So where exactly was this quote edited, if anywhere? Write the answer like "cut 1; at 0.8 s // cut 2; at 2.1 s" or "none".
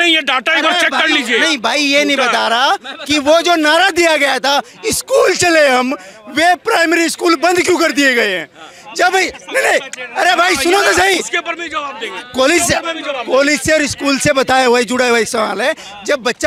none